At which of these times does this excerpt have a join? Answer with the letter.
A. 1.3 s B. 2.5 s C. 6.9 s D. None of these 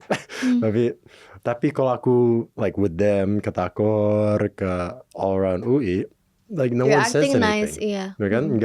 A